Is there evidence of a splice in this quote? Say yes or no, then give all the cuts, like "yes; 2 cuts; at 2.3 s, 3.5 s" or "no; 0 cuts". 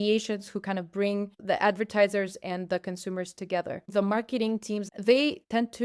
yes; 3 cuts; at 1.4 s, 3.9 s, 4.9 s